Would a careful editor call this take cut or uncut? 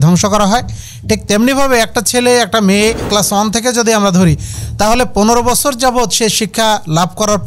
cut